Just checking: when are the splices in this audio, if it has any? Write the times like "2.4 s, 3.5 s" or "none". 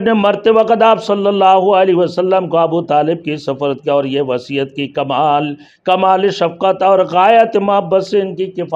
none